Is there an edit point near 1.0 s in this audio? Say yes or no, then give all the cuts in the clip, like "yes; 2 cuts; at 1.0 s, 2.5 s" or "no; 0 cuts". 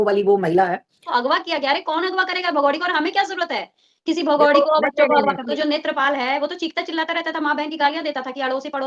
yes; 2 cuts; at 1.0 s, 5.5 s